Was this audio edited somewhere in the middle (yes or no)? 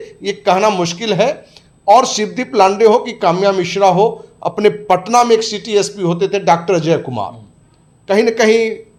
no